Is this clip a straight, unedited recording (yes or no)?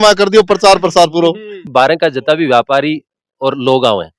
no